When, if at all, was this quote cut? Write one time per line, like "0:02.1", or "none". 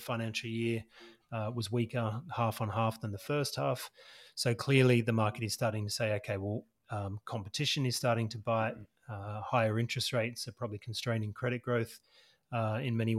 none